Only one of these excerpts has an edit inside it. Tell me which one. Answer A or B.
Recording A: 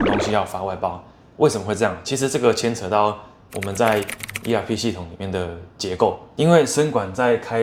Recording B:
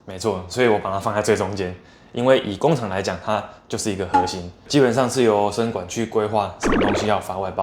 B